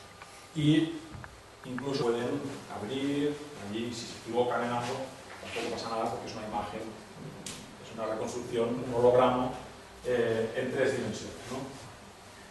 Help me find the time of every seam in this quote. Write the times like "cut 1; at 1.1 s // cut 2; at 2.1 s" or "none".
none